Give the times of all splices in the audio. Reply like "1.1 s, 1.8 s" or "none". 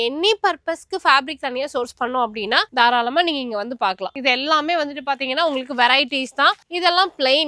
none